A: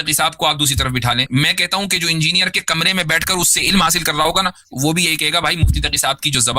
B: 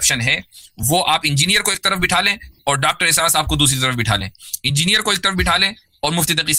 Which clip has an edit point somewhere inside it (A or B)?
A